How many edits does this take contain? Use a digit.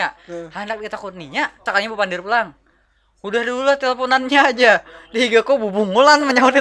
1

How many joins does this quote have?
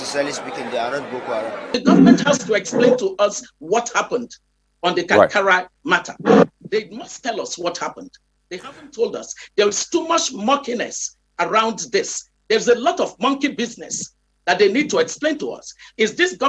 1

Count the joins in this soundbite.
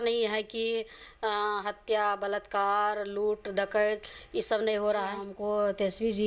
1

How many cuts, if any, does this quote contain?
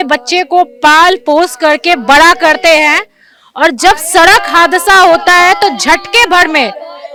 0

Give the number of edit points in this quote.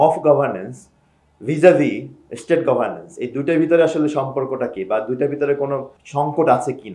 1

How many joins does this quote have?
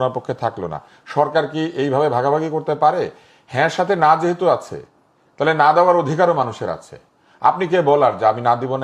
0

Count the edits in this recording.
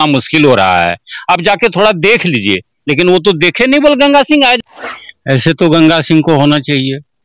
1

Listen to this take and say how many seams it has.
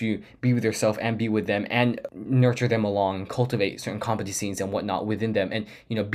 1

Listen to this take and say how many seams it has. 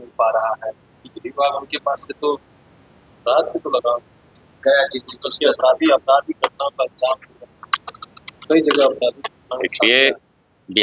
0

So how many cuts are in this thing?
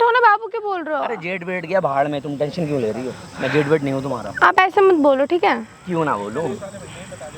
0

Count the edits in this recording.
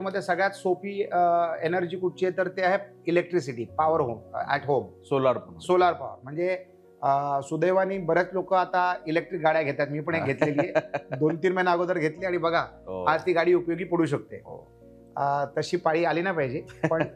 0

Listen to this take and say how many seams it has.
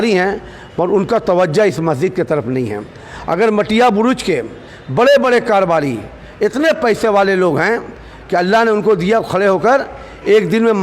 0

